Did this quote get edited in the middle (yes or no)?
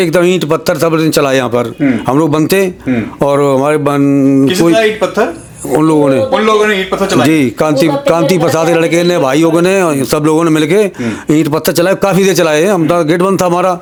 no